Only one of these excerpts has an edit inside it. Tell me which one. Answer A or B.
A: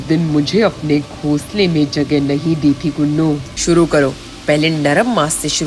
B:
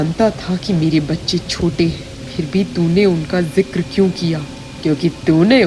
A